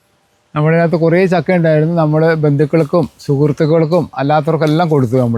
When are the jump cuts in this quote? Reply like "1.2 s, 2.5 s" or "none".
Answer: none